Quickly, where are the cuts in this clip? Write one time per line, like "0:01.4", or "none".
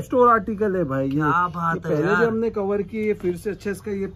none